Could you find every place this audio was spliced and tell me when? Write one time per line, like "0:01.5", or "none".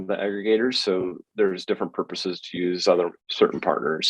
0:03.2